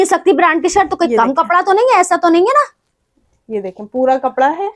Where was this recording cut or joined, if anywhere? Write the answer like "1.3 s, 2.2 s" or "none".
none